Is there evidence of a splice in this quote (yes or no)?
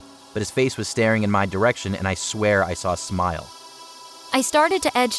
yes